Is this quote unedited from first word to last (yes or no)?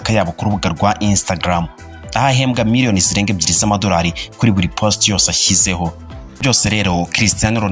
no